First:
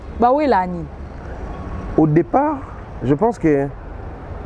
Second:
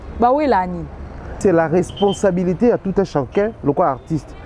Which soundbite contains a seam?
second; 1 cut; at 1.4 s

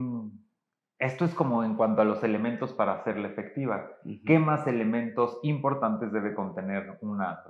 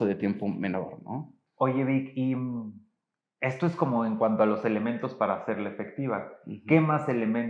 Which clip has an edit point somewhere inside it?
second; 1 cut; at 1.4 s

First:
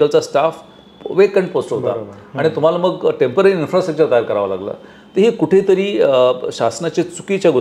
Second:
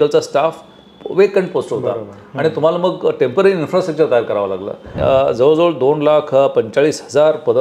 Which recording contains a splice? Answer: second; 1 cut; at 4.8 s

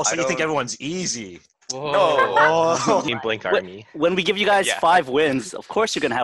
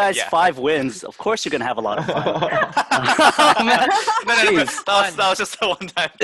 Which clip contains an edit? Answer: first; 1 cut; at 3.1 s

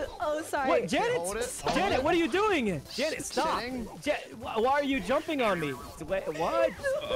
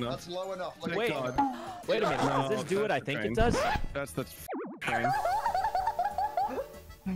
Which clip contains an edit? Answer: first; 2 cuts; at 2.8 s, 5.9 s

